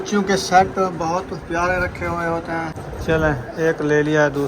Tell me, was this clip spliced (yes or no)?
yes